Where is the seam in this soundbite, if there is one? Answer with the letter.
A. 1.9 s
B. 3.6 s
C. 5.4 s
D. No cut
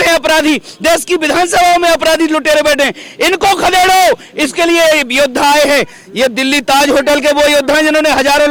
D